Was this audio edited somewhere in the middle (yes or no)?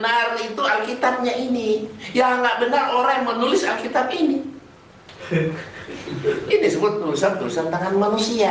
no